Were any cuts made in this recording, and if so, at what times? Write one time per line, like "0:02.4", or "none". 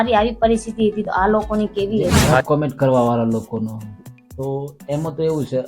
0:02.4